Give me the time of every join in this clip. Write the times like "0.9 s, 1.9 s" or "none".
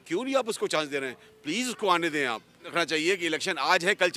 2.7 s